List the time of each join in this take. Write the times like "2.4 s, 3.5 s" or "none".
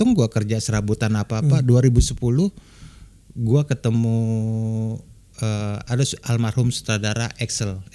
none